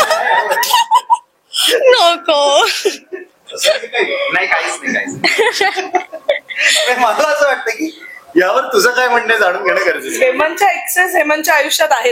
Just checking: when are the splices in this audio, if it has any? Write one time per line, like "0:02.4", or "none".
none